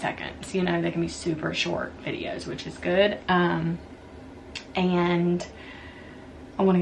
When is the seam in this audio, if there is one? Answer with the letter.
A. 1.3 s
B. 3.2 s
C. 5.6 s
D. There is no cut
D